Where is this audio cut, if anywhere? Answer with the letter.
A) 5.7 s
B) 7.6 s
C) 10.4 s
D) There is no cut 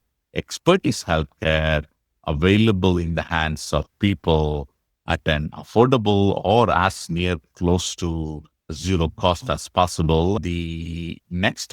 C